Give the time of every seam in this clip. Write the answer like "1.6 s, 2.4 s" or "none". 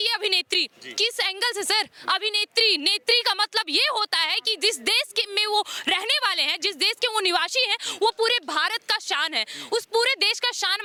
none